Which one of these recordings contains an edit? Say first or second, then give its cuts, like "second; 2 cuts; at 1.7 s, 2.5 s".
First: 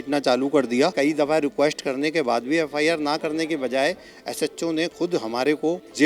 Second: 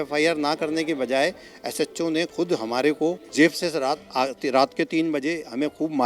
first; 1 cut; at 0.9 s